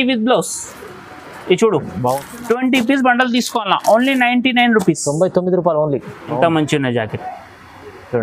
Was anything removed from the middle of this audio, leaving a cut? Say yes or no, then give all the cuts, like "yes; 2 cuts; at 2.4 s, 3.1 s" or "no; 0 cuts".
yes; 2 cuts; at 2.2 s, 6.2 s